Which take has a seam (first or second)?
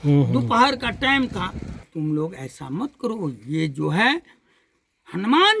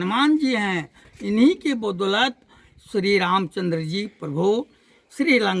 first